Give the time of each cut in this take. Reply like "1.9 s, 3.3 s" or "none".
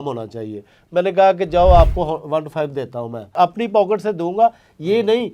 3.3 s